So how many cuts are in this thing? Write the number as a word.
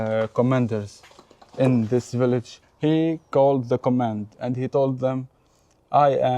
one